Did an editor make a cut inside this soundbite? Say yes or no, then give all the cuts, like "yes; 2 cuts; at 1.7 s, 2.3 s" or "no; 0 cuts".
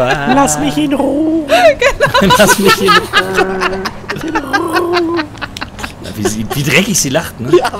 yes; 1 cut; at 4.3 s